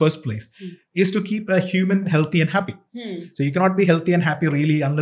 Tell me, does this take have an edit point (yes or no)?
no